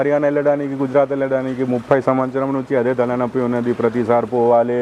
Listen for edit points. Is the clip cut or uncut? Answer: uncut